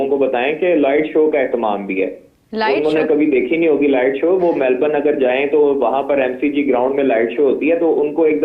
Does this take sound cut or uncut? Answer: uncut